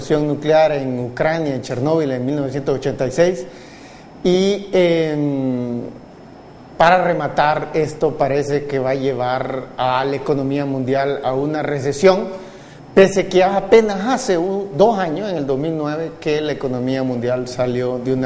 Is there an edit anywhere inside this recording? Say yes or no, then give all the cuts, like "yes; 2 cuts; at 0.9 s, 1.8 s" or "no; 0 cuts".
no; 0 cuts